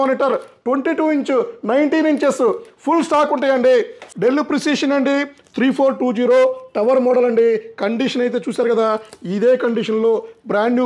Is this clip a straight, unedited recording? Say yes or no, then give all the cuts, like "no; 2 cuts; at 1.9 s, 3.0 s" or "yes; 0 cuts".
no; 1 cut; at 4.0 s